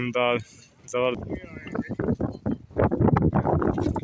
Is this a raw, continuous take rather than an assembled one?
no; 1 cut; at 1.2 s

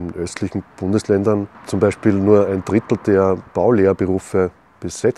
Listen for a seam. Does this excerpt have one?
yes; 2 cuts; at 1.6 s, 3.5 s

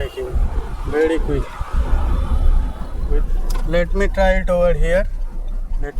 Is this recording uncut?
no; 1 cut; at 3.1 s

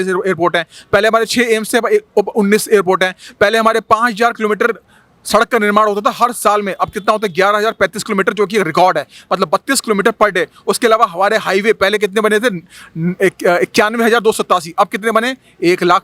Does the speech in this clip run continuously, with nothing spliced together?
yes; 0 cuts

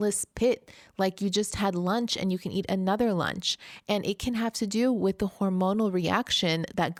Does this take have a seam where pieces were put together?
no; 0 cuts

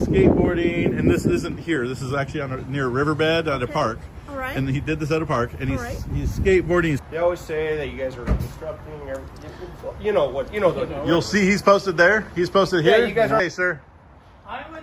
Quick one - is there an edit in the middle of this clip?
yes; 2 cuts; at 7.0 s, 13.4 s

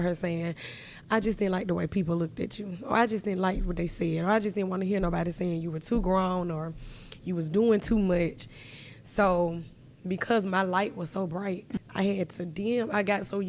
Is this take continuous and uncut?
no; 1 cut; at 11.7 s

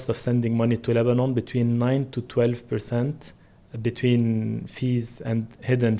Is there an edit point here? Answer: no; 0 cuts

